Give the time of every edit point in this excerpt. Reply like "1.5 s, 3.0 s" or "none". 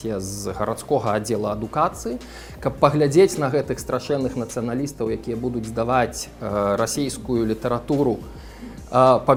none